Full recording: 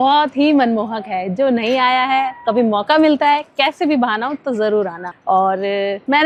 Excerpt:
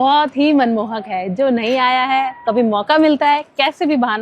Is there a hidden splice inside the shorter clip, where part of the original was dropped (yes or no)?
no